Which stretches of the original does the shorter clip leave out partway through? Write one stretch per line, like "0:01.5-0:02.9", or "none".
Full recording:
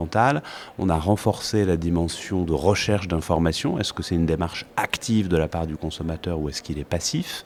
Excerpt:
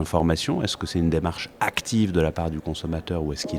none